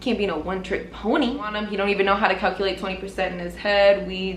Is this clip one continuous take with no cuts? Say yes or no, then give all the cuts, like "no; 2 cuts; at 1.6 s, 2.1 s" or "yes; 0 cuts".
no; 1 cut; at 1.6 s